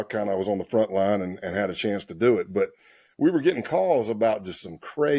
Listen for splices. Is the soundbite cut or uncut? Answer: uncut